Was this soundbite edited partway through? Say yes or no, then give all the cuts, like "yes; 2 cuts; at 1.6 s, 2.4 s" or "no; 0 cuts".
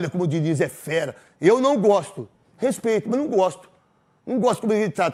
no; 0 cuts